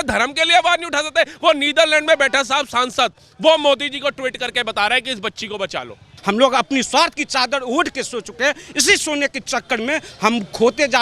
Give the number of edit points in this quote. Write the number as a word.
one